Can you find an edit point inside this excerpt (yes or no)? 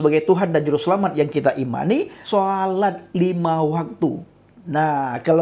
yes